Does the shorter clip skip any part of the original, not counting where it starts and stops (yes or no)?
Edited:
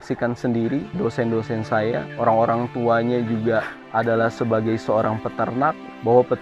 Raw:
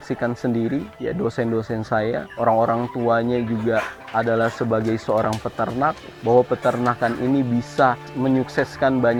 yes